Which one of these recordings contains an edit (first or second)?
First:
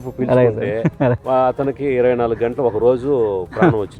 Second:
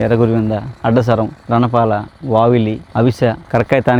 first